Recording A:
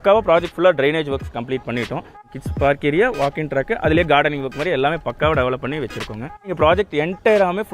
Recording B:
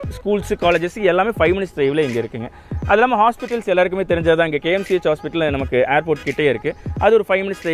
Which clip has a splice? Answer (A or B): A